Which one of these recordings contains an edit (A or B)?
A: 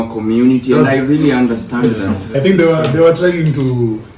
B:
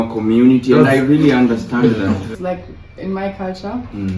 B